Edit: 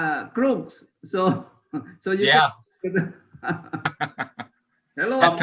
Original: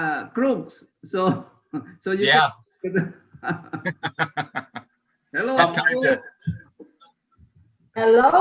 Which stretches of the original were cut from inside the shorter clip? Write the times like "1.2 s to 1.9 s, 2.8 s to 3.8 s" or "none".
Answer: 3.9 s to 4.2 s